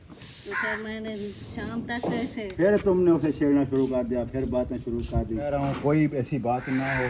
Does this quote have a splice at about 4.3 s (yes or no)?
no